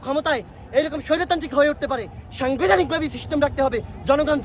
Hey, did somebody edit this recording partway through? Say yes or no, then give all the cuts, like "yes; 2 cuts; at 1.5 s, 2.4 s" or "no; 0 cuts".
no; 0 cuts